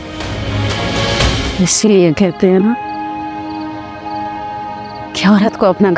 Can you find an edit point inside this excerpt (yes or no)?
yes